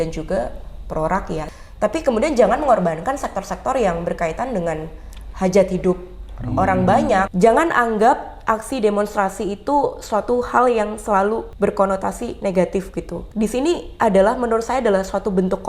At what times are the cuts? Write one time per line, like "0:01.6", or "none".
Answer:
0:01.6
0:07.3
0:11.5
0:13.2